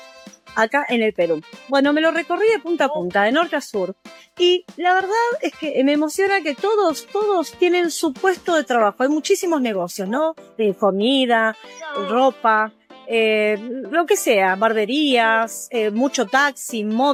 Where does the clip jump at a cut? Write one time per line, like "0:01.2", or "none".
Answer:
none